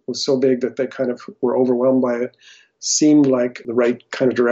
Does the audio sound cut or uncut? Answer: cut